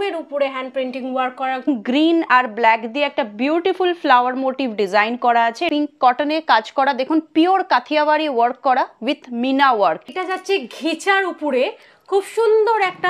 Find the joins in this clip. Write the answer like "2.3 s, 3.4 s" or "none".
1.7 s, 5.6 s, 10.1 s